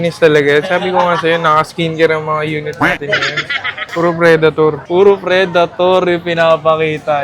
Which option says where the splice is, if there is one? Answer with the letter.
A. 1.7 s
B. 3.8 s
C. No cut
B